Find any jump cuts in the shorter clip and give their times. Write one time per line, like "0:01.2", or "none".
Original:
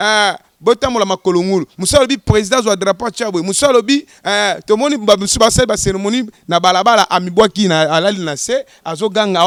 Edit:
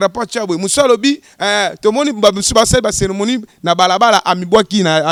none